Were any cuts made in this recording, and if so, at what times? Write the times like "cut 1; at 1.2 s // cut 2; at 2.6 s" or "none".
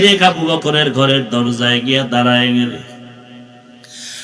none